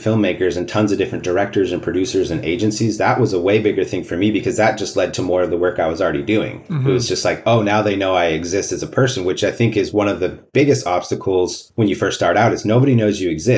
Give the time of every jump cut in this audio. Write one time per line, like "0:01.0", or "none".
none